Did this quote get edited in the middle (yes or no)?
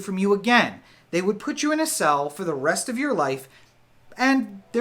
no